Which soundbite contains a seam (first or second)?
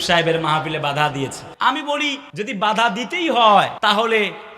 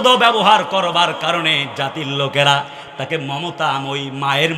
first